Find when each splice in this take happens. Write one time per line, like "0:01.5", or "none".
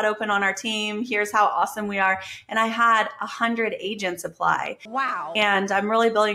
none

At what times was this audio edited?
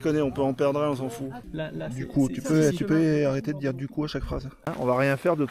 0:01.4
0:04.6

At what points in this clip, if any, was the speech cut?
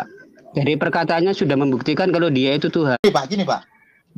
0:03.0

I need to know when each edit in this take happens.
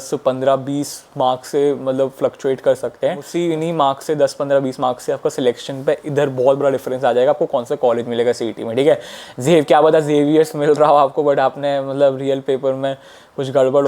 none

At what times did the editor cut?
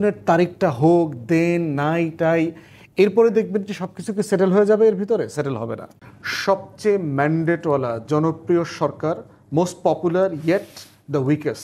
0:05.9

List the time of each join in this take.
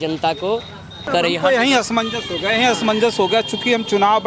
0:01.1

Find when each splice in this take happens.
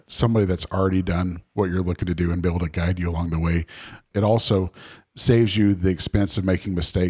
0:04.1

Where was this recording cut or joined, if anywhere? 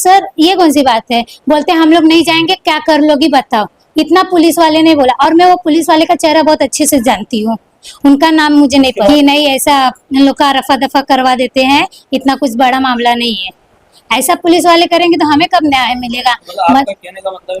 0:09.1

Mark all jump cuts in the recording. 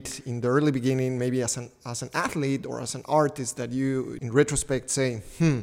0:04.2

